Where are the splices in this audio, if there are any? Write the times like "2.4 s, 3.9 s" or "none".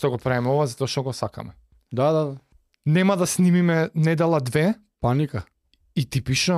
1.8 s, 2.5 s